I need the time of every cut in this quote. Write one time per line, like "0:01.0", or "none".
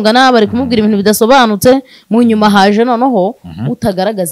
none